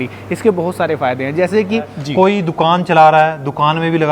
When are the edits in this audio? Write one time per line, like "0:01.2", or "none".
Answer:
0:02.0

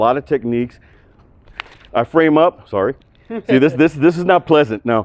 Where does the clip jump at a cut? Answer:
0:00.9

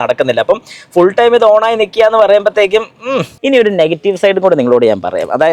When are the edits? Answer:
0:03.3

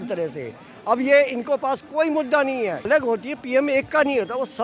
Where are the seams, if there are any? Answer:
0:02.9

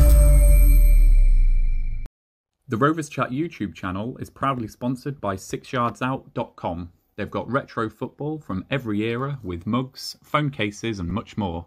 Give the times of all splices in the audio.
0:02.6

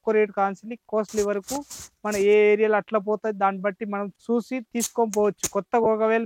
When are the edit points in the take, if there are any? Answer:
0:04.2

